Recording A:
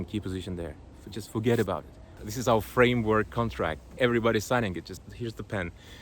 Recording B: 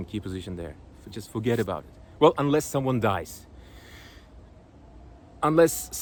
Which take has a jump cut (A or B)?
A